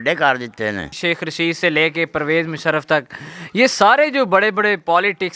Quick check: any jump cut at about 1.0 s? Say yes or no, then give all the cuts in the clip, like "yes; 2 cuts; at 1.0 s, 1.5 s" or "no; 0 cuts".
yes; 1 cut; at 1.0 s